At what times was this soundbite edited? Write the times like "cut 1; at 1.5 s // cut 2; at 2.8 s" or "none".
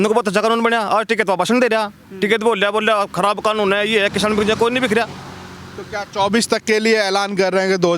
none